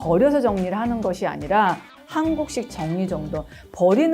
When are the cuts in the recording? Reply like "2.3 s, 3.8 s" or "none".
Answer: 1.9 s